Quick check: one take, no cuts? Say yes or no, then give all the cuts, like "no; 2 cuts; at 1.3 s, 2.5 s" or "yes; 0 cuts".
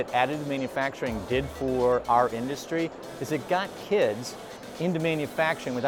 yes; 0 cuts